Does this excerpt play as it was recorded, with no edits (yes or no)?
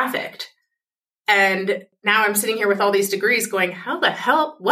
no